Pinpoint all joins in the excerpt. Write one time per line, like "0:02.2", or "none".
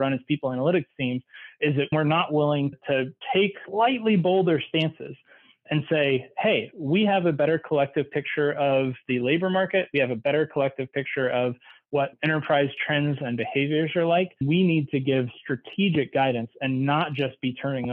0:01.9
0:14.4